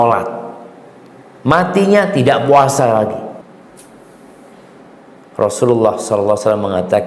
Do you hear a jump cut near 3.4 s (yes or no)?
yes